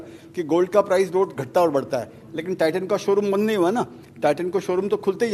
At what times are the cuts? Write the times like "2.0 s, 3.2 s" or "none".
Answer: none